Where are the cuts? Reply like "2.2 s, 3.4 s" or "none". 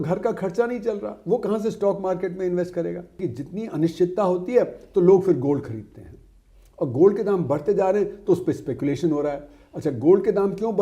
3.2 s